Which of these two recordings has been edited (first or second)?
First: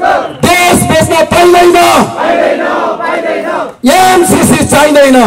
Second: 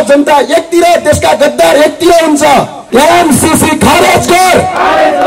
second